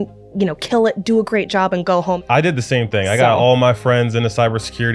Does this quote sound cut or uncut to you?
cut